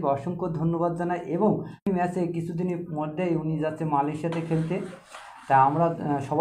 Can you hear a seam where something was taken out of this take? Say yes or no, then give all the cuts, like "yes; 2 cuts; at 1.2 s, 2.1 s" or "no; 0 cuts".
yes; 1 cut; at 1.9 s